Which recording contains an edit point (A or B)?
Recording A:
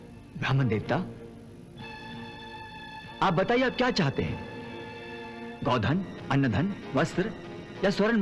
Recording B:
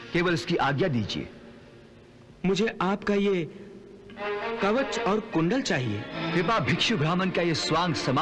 B